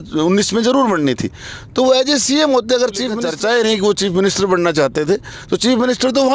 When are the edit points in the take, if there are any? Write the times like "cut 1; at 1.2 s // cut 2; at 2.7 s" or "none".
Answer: cut 1; at 3.1 s